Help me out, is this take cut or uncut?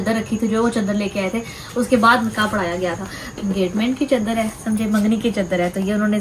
cut